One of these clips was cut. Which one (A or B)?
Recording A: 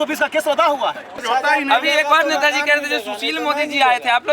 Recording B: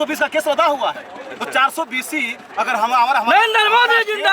A